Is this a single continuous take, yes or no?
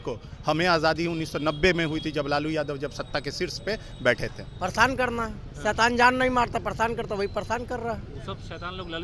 no